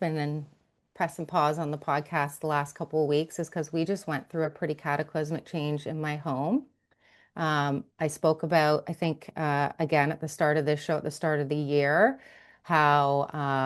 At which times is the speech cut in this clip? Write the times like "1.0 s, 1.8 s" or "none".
none

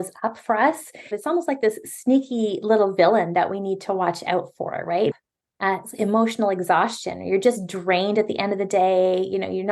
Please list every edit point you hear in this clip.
1.2 s, 5.1 s

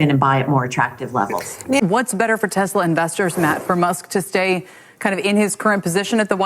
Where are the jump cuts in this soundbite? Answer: 1.8 s

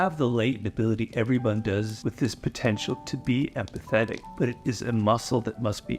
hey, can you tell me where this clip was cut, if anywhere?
1.9 s, 4.2 s

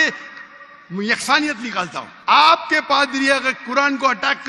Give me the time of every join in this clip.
2.1 s

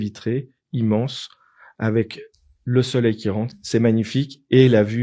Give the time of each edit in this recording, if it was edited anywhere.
3.5 s

